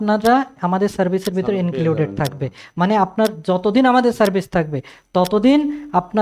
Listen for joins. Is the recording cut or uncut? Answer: uncut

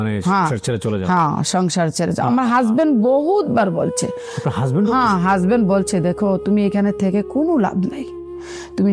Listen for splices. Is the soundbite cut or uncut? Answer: uncut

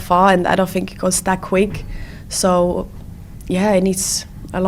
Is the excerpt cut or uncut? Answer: uncut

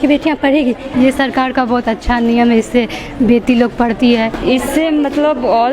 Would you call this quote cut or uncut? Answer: cut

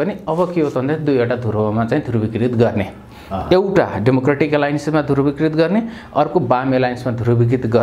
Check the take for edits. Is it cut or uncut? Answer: uncut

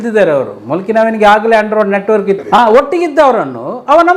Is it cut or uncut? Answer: cut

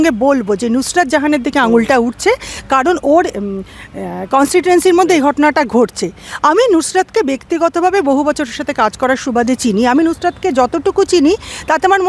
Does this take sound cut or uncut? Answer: uncut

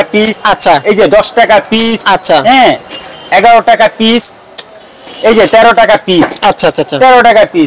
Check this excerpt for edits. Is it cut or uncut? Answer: uncut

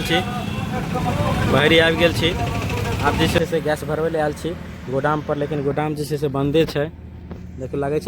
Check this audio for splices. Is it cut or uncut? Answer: cut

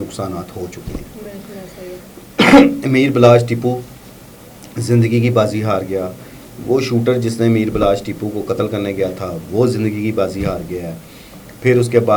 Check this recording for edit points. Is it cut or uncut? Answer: uncut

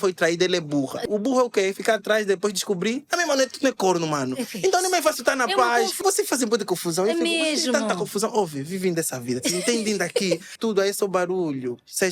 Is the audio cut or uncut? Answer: cut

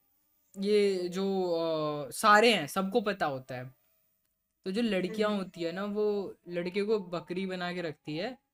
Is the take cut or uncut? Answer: uncut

